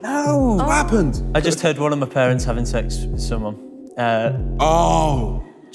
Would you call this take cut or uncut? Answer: cut